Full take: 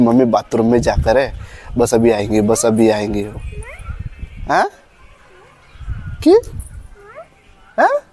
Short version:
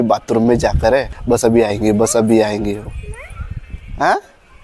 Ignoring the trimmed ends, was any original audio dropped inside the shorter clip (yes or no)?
yes